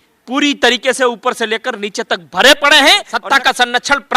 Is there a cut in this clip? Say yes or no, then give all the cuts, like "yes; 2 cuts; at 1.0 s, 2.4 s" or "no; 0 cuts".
yes; 1 cut; at 3.1 s